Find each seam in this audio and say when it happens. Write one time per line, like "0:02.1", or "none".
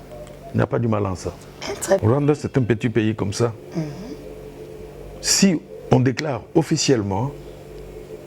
0:02.0